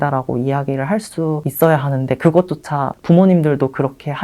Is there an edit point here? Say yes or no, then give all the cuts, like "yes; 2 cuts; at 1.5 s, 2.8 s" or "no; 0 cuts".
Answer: yes; 2 cuts; at 1.5 s, 2.9 s